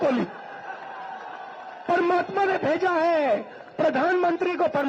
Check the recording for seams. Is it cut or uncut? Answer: uncut